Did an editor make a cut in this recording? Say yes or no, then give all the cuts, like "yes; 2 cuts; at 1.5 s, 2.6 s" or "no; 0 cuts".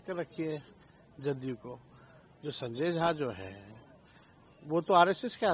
no; 0 cuts